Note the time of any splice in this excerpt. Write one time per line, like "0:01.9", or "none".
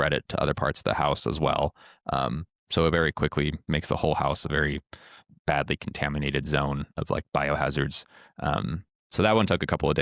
none